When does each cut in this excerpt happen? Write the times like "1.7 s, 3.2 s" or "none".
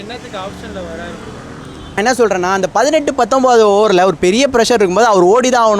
1.9 s